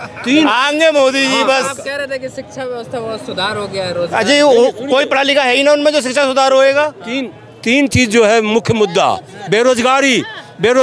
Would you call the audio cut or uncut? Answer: uncut